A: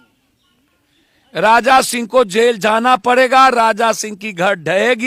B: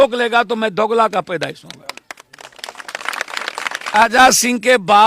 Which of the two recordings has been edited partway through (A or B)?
B